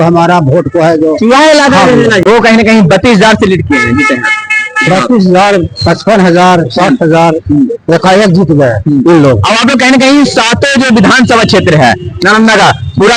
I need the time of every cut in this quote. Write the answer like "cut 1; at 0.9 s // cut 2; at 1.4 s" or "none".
cut 1; at 2.2 s